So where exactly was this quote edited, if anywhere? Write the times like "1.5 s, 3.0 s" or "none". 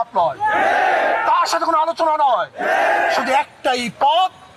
none